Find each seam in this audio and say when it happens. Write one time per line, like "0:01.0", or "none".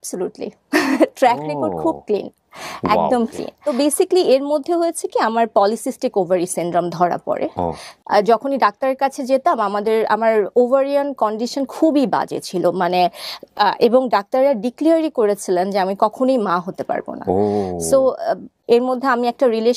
0:03.5
0:07.9
0:18.5